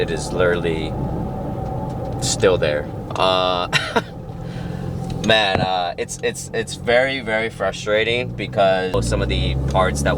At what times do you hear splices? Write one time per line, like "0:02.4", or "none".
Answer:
none